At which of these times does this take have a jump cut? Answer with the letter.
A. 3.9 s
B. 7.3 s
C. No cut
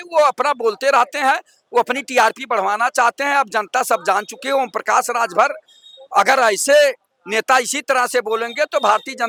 C